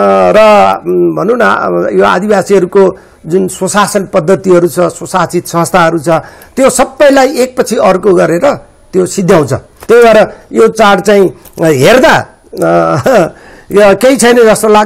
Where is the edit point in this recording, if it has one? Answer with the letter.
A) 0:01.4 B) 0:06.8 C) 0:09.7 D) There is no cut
C